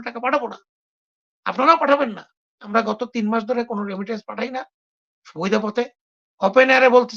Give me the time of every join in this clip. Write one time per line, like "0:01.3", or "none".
0:02.6